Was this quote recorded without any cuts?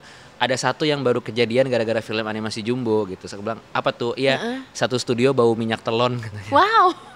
yes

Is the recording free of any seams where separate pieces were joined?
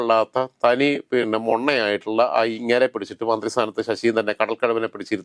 yes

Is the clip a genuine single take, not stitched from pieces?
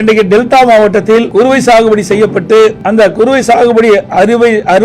no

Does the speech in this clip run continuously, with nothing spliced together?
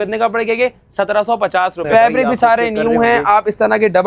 no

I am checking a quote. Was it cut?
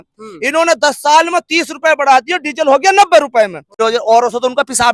yes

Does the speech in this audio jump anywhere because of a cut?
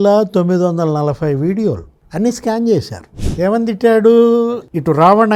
yes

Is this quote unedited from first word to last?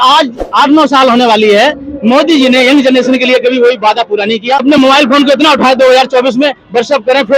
no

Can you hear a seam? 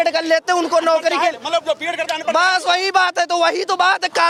no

